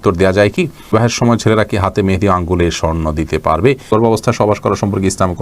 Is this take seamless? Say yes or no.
no